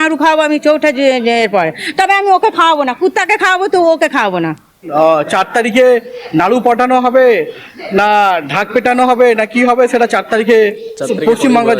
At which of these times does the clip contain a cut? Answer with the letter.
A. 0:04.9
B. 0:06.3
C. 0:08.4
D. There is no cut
A